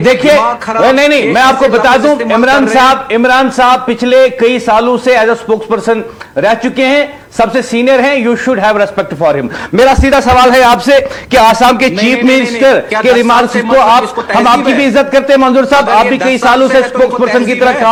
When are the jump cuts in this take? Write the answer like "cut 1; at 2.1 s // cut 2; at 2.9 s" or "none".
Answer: none